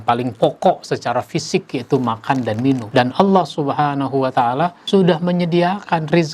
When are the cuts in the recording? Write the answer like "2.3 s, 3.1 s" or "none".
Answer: 2.8 s, 4.8 s